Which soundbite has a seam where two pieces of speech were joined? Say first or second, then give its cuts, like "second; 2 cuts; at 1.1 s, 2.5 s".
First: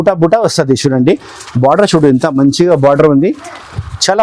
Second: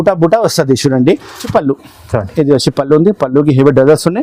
second; 1 cut; at 1.5 s